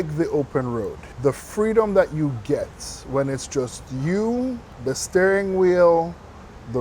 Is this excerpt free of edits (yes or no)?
no